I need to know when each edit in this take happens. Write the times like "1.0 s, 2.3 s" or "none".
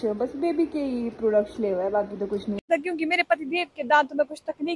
2.5 s

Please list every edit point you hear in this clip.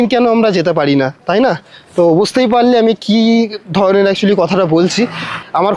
none

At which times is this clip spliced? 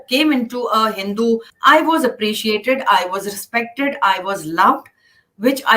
1.5 s

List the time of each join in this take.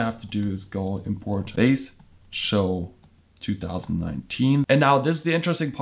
1.5 s, 4.7 s

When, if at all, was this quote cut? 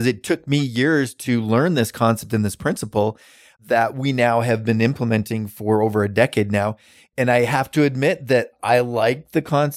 7.0 s

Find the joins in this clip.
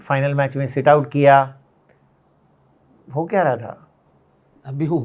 none

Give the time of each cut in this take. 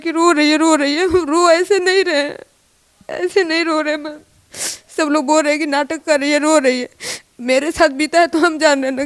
none

